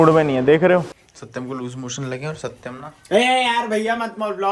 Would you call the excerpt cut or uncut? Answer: cut